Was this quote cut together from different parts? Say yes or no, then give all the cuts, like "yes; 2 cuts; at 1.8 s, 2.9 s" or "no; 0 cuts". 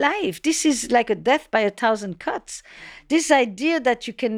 no; 0 cuts